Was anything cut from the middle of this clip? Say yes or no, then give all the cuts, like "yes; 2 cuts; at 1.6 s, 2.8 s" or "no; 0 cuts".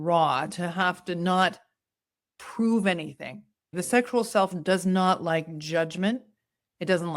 yes; 1 cut; at 3.8 s